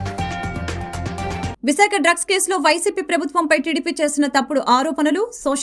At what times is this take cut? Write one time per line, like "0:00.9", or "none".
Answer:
0:01.3